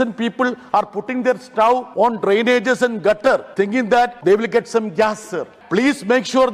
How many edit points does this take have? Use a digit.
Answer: 3